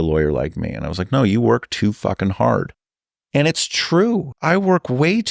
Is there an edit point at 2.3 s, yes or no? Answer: no